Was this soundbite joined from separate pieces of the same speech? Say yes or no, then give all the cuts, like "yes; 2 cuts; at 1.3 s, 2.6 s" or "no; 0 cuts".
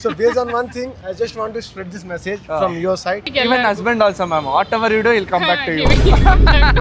yes; 1 cut; at 3.2 s